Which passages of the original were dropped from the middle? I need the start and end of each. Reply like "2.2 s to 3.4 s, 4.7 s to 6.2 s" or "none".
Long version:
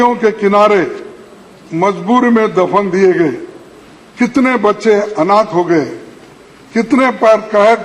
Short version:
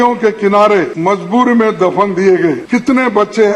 0.9 s to 1.7 s, 3.4 s to 4.1 s